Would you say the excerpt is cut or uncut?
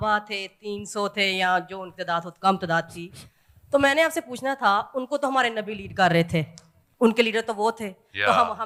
uncut